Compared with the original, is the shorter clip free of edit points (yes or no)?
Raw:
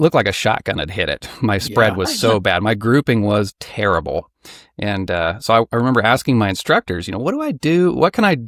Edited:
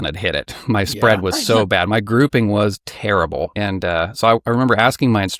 no